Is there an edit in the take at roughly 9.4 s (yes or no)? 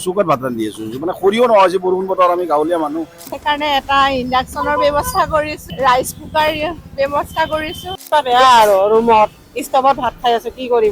no